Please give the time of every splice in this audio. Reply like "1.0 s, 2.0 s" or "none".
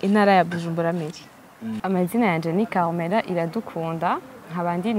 1.8 s